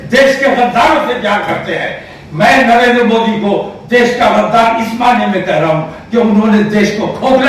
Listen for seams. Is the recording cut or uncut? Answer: uncut